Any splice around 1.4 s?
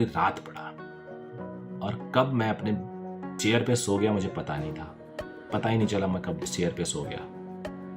no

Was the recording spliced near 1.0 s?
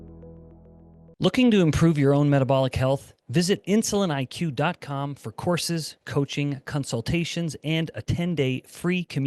yes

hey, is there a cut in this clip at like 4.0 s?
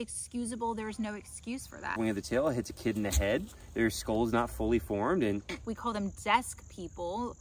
no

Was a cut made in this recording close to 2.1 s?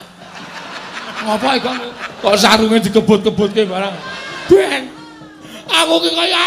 yes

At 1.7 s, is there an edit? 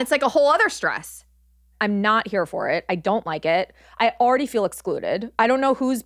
yes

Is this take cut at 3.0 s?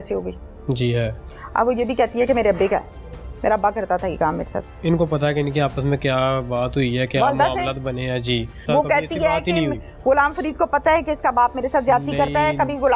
no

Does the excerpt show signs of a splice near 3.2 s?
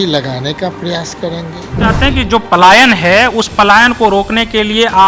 no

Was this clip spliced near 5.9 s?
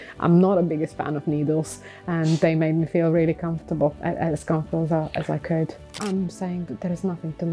yes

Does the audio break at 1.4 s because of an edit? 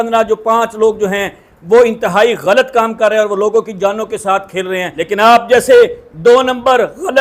no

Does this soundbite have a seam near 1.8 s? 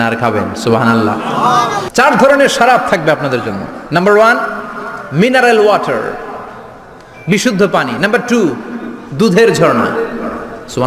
yes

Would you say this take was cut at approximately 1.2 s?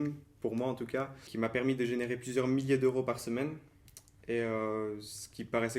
yes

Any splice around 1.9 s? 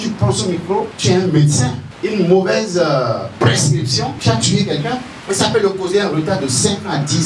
yes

